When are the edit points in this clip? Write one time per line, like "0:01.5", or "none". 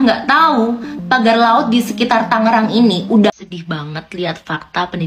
0:03.3